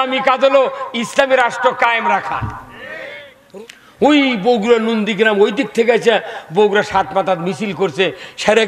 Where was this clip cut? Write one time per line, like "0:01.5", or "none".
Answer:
0:03.3